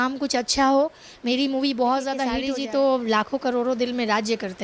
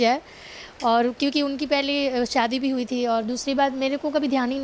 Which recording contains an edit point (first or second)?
first